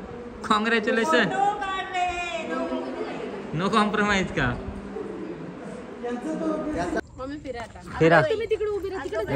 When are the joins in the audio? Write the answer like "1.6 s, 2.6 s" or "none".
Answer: 7.0 s

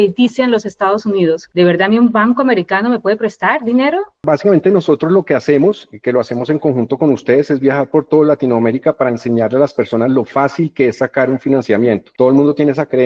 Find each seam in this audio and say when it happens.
none

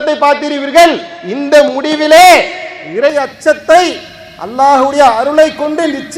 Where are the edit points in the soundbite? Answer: none

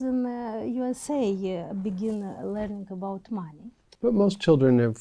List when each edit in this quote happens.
3.8 s

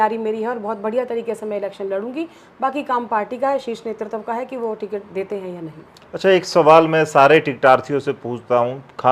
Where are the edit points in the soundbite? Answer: none

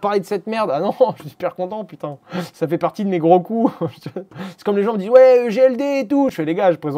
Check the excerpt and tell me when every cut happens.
none

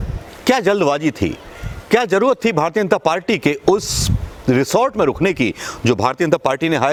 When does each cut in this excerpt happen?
none

